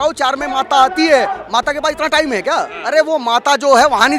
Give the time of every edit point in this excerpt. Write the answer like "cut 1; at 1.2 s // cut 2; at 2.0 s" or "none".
cut 1; at 2.8 s